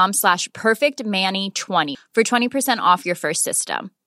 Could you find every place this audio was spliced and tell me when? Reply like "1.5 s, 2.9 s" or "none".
1.9 s